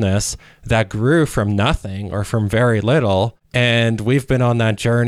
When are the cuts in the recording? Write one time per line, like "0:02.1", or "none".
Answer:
0:03.4